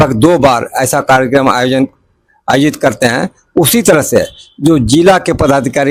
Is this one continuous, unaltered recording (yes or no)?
yes